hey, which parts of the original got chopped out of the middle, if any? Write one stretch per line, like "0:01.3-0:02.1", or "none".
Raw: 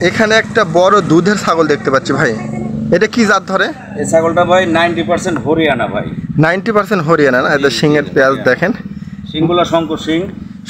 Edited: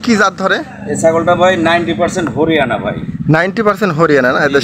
none